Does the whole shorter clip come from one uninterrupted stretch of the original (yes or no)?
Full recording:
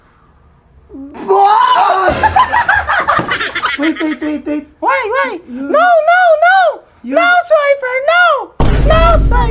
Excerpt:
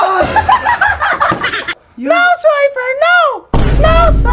no